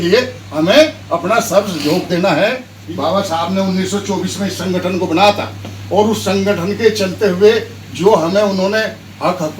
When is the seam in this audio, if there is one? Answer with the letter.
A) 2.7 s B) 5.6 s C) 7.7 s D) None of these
A